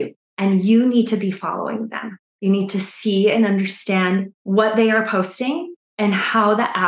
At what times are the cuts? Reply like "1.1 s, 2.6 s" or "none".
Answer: 4.3 s